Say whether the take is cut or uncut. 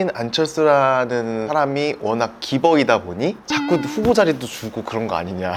uncut